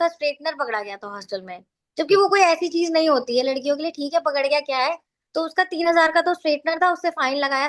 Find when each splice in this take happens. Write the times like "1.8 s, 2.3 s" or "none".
none